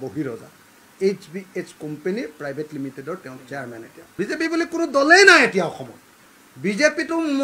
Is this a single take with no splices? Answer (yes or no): no